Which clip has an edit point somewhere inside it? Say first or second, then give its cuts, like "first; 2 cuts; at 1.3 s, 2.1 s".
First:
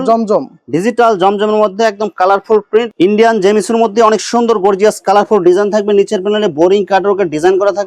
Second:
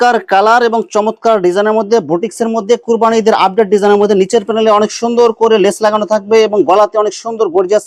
first; 1 cut; at 2.9 s